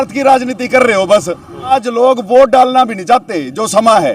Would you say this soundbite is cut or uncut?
cut